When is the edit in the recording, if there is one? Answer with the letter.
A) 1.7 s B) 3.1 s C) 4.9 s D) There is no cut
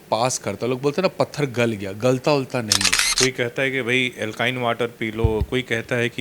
B